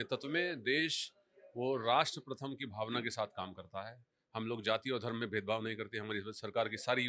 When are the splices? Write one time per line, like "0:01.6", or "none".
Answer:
none